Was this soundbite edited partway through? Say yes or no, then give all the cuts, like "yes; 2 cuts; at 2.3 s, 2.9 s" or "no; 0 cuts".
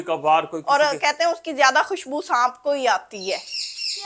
no; 0 cuts